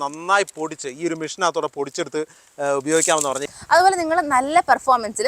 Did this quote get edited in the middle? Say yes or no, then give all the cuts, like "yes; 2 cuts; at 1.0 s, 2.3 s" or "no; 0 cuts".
yes; 1 cut; at 3.5 s